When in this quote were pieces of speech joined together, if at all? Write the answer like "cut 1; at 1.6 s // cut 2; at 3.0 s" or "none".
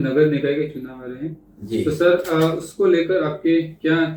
none